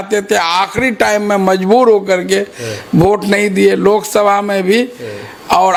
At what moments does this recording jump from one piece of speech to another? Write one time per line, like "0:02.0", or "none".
none